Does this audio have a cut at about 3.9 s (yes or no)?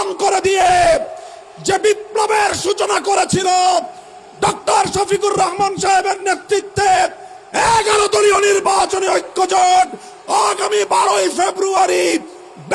no